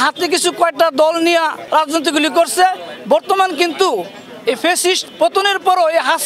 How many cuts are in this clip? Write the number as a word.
one